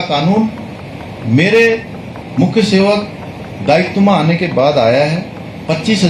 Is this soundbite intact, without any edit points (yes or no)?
yes